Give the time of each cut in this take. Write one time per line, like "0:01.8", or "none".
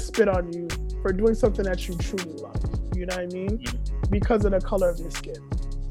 none

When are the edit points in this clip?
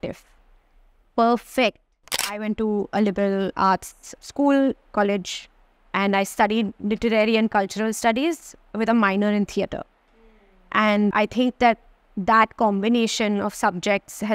0:02.2
0:03.7
0:04.9
0:11.1

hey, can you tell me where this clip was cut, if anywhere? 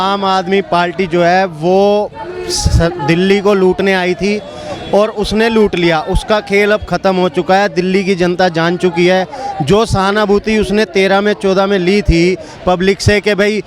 none

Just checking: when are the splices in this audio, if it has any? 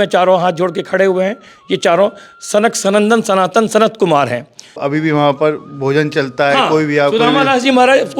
0:04.8

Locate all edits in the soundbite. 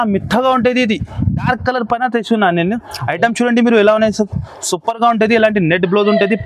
0:01.5

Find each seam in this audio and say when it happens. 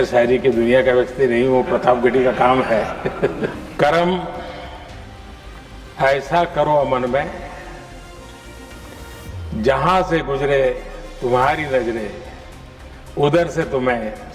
0:03.6

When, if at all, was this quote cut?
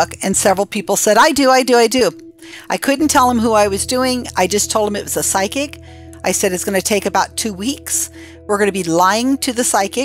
none

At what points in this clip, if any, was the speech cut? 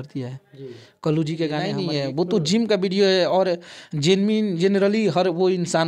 0:01.8

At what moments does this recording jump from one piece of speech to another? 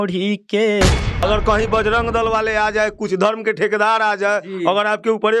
0:01.2

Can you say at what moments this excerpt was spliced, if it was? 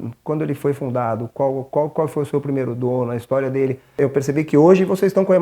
0:04.0

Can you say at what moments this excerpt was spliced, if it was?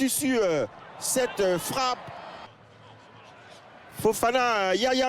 0:02.5

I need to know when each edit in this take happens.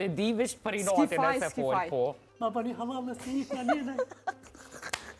0:02.3

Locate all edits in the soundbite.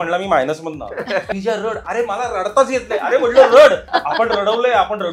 0:01.3
0:03.9

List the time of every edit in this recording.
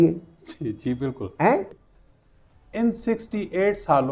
0:01.8

